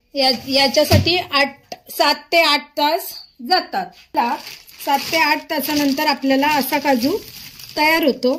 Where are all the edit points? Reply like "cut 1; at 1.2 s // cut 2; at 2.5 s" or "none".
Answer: cut 1; at 4.1 s